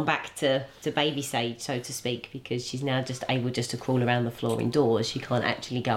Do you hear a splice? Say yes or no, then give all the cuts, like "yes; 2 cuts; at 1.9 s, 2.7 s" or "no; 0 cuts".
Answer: no; 0 cuts